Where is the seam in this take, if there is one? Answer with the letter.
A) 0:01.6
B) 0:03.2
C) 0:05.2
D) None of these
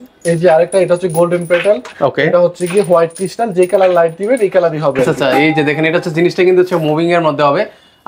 C